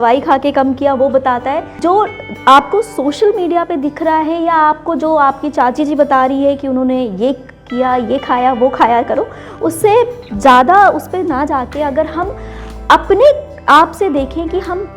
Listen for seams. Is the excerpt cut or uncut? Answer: cut